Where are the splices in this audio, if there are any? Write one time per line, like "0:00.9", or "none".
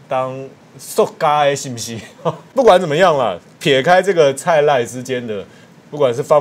0:02.4